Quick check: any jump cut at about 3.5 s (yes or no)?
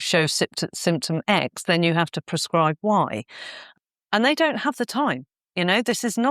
yes